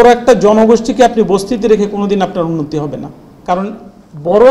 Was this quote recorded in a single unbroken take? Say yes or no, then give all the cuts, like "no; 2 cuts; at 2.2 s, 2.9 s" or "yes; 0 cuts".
yes; 0 cuts